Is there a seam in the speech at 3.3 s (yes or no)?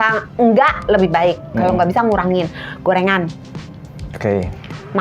no